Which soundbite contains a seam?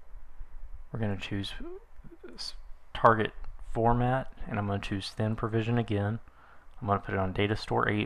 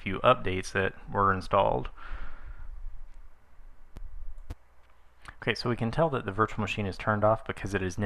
second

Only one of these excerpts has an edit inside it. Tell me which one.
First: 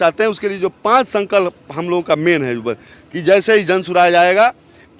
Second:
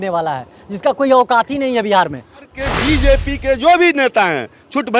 second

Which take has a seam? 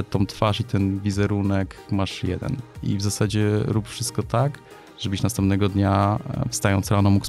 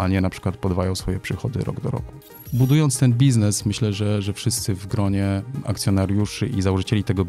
second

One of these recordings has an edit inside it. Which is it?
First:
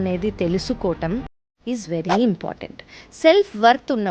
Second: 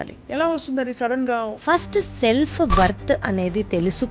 second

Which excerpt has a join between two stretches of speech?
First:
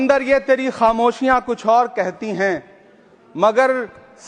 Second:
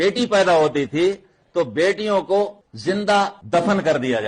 second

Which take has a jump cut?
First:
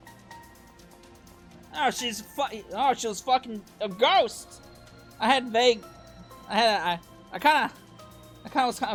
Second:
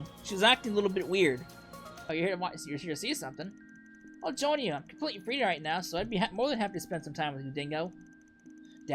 second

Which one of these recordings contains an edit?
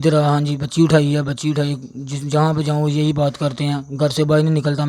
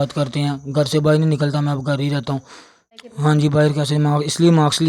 second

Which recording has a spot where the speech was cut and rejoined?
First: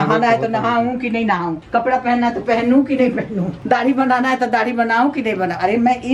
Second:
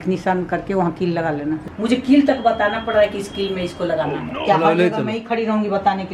second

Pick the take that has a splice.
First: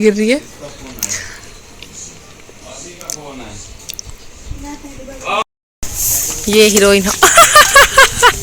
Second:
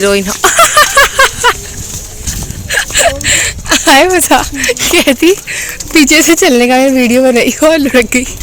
first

